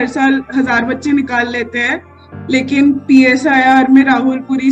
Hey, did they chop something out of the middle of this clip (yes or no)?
no